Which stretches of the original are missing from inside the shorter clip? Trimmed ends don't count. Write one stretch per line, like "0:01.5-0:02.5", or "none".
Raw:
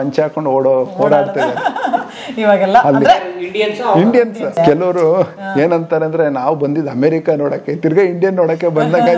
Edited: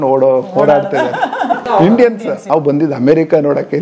0:02.1-0:03.8
0:04.6-0:06.4